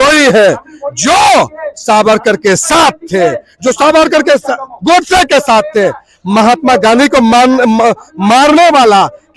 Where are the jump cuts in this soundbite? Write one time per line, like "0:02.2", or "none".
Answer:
none